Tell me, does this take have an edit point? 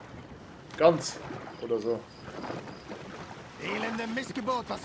no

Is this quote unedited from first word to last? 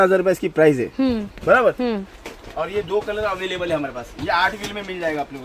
yes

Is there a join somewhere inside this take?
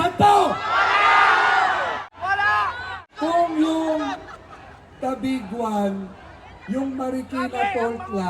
yes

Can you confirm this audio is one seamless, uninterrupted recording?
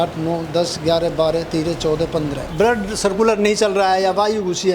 no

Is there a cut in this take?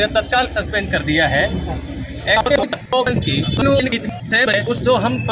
no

